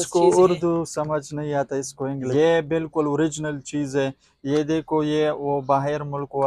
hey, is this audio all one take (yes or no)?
no